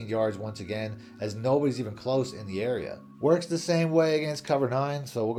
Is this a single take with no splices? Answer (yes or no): yes